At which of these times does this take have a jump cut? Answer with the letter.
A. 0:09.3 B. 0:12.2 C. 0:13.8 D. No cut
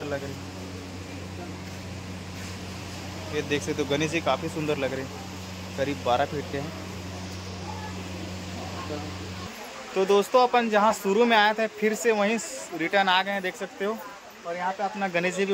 A